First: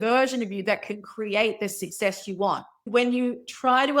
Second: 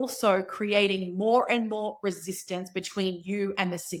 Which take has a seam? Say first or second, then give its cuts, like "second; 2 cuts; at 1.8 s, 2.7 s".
first; 1 cut; at 2.7 s